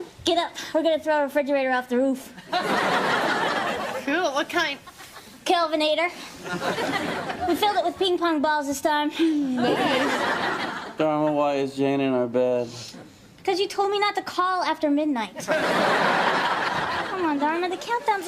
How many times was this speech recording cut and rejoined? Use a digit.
1